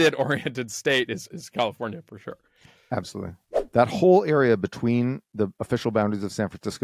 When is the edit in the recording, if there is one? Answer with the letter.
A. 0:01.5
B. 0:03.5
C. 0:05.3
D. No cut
B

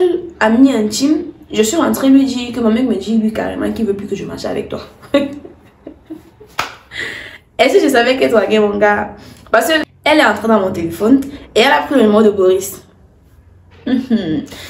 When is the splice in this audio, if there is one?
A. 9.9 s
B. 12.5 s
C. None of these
A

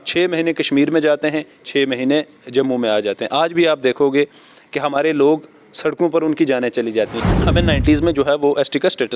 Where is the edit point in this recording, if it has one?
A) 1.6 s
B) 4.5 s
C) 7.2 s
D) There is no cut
C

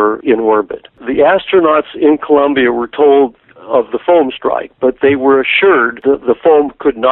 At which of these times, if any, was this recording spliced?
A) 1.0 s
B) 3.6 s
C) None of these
A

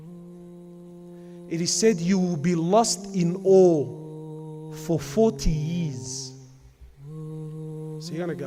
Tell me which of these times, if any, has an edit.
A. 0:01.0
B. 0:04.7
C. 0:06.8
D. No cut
D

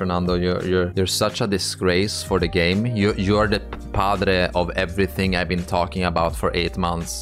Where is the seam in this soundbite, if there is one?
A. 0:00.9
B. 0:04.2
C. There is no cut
A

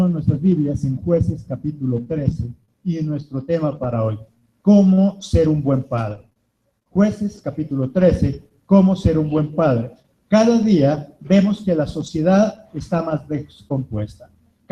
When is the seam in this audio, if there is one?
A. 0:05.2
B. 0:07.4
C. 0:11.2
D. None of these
D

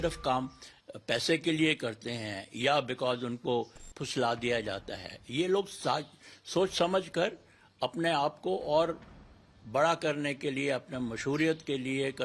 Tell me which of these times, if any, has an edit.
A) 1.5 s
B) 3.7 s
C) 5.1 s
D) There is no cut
D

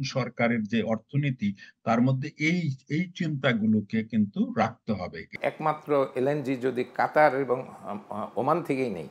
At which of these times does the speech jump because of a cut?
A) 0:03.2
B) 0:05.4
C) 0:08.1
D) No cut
B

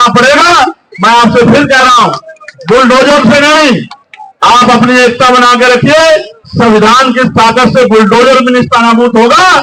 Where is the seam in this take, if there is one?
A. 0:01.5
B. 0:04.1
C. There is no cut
C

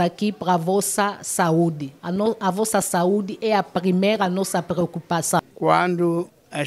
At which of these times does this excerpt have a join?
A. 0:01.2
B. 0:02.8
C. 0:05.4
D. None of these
C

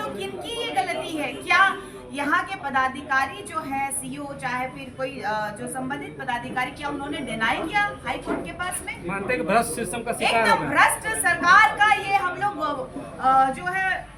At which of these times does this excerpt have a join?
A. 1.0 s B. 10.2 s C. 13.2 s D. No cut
D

